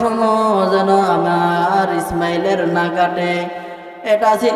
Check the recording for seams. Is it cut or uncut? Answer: uncut